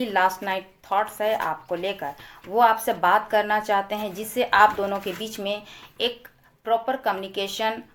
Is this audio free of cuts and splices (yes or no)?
yes